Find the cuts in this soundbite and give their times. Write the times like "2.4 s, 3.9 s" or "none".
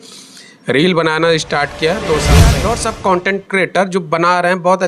2.6 s